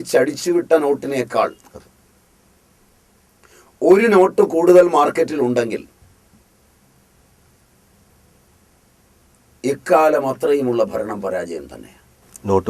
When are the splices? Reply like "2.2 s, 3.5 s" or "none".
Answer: none